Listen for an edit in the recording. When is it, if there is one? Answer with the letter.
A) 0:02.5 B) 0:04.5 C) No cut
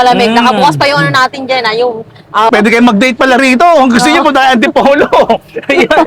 A